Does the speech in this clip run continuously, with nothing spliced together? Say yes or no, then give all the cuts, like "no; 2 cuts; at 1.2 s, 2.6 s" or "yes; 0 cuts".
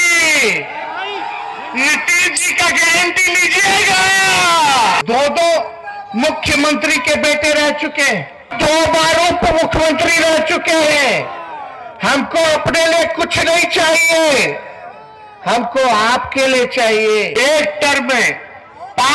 no; 3 cuts; at 5.0 s, 8.5 s, 17.3 s